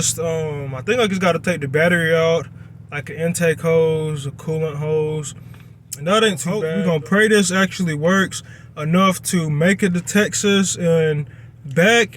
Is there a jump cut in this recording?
yes; 1 cut; at 6.6 s

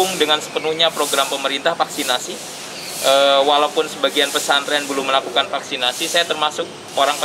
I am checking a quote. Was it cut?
no; 0 cuts

